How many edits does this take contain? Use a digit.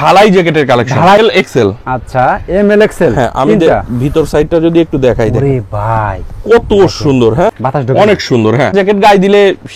3